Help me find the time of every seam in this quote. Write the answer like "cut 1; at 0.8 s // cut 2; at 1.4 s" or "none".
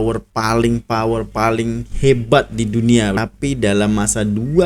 cut 1; at 3.2 s